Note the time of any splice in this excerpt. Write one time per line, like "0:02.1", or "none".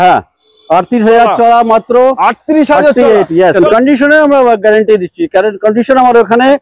0:03.5